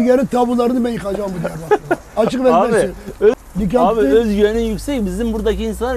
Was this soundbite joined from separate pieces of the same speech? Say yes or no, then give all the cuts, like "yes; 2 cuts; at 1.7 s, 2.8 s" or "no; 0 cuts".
yes; 1 cut; at 3.3 s